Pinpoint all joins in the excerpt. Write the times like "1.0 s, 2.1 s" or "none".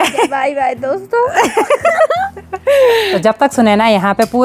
none